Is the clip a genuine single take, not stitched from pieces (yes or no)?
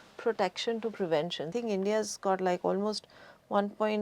no